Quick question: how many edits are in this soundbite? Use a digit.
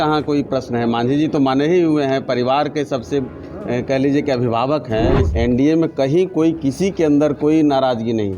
1